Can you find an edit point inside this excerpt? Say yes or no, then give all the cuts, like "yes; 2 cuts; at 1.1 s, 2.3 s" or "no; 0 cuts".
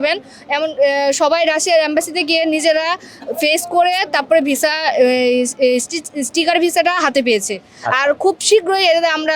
no; 0 cuts